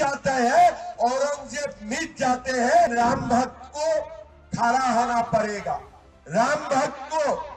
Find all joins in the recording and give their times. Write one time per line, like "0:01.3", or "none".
0:02.9